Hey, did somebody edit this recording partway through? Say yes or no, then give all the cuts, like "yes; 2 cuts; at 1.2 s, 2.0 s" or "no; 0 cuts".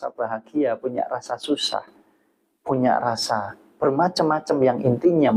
no; 0 cuts